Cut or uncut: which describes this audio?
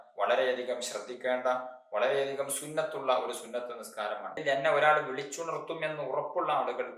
cut